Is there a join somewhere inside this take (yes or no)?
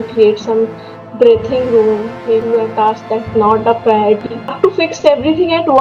yes